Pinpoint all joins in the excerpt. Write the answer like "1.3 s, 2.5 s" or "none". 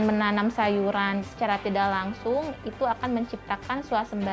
1.2 s